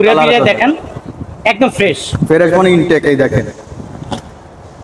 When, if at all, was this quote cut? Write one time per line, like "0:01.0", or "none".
none